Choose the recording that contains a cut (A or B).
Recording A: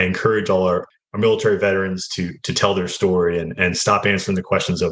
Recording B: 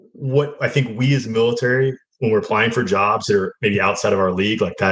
A